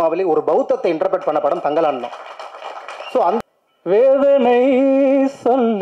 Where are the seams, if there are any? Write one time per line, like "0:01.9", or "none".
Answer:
0:03.4